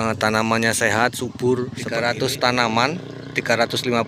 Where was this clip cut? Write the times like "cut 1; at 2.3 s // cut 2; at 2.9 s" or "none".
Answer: cut 1; at 1.8 s